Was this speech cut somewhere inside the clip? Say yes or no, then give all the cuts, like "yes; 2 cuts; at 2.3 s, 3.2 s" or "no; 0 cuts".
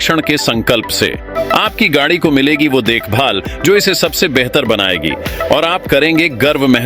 yes; 1 cut; at 1.3 s